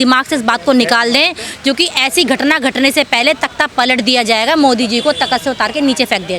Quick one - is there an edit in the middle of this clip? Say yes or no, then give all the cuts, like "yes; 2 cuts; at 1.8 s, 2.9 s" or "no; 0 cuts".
no; 0 cuts